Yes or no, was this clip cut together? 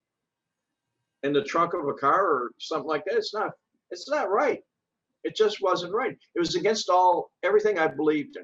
no